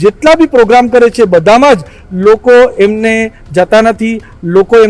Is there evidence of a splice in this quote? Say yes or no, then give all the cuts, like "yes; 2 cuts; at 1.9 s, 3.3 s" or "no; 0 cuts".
no; 0 cuts